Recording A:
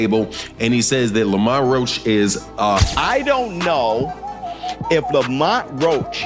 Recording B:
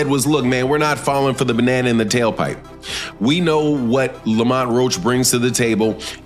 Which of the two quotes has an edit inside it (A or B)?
A